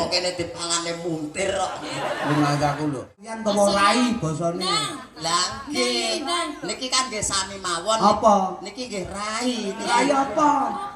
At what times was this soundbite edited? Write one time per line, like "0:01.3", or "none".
0:03.3